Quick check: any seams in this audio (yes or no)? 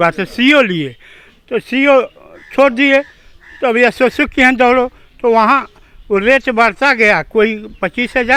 no